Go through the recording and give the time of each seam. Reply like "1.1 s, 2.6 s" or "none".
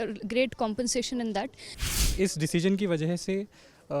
2.0 s

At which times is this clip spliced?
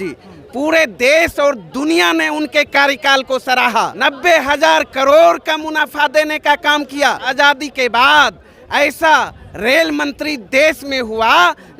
3.9 s, 7.2 s

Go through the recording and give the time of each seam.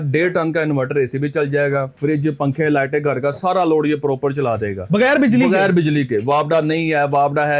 none

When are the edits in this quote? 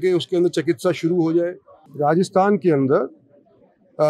1.8 s

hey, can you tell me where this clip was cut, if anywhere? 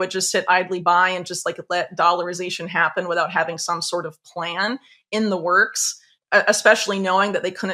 none

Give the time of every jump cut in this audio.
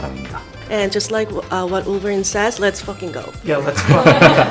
none

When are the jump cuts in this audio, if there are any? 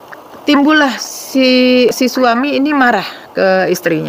1.9 s

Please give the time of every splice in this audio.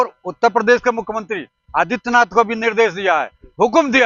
none

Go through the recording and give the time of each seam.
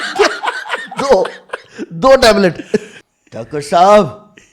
3.0 s

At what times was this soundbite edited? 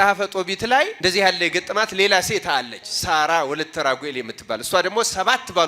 0.9 s

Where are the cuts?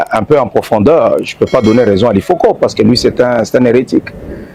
none

